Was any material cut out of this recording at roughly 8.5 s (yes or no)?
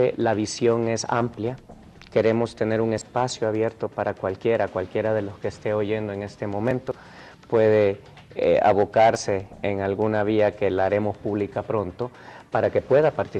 yes